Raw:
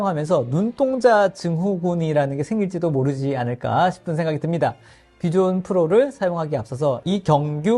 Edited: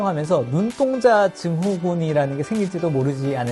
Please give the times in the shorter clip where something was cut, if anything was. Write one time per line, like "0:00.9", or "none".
none